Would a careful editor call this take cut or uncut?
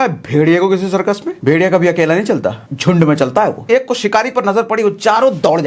cut